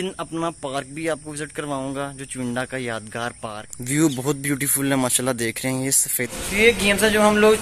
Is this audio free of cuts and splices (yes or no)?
no